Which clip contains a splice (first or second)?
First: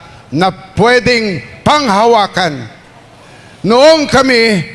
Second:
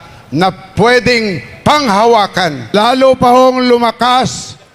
second